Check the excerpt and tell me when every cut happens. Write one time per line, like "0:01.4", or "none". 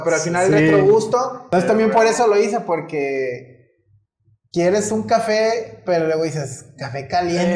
0:01.4